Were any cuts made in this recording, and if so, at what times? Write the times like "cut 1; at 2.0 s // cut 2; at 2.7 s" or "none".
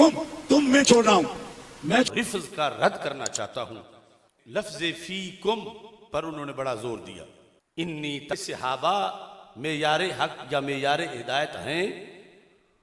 cut 1; at 2.1 s // cut 2; at 8.3 s